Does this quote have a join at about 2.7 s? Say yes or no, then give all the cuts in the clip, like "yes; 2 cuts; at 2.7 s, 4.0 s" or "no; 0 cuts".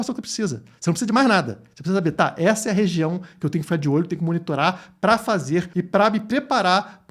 no; 1 cut; at 5.7 s